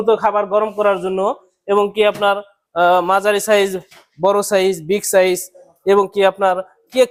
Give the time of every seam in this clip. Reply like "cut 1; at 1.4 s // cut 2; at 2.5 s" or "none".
none